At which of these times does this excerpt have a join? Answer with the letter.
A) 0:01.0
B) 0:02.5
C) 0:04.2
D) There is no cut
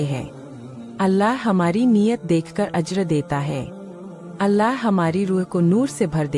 B